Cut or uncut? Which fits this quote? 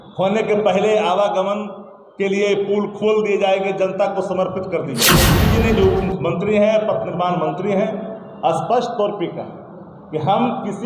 cut